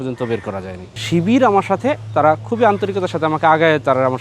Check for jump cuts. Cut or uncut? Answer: cut